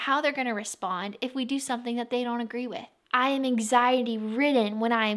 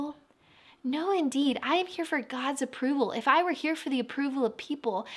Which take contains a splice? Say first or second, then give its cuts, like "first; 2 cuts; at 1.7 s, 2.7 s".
first; 1 cut; at 2.9 s